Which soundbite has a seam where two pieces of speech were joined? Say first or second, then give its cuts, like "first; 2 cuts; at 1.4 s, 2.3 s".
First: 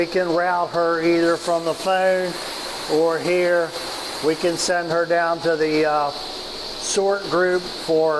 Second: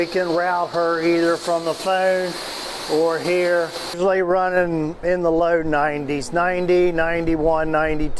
second; 1 cut; at 4.0 s